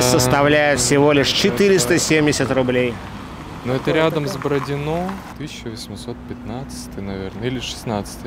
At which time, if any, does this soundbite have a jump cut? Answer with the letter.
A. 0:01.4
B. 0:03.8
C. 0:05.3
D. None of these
C